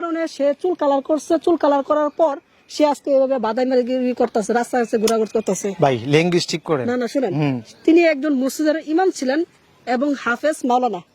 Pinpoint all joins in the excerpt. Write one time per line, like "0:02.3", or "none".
none